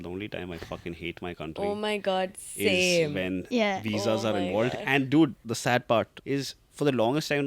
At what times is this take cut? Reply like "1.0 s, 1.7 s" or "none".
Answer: 5.4 s, 6.2 s